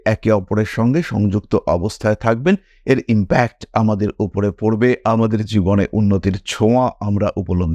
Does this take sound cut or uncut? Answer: uncut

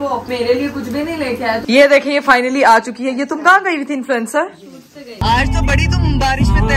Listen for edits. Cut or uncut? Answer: cut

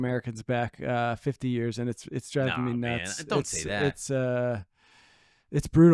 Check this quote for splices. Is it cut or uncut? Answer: uncut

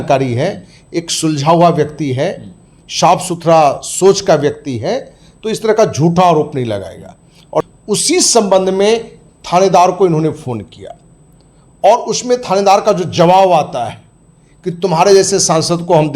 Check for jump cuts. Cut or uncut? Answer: cut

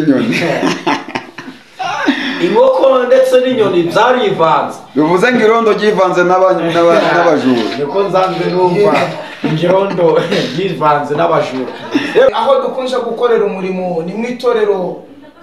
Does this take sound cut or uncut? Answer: cut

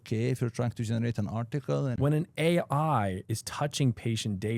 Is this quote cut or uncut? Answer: cut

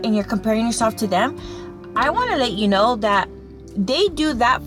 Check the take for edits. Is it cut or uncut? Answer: uncut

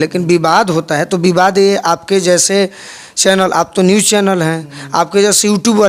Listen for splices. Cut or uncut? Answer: uncut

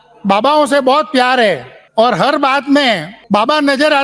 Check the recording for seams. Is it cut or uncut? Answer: cut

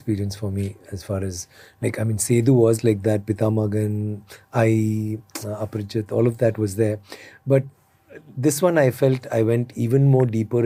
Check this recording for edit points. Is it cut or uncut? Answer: uncut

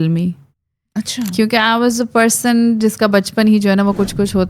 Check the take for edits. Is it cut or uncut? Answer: uncut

